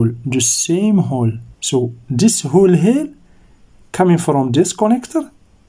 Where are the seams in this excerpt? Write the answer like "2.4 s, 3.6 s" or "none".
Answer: 1.5 s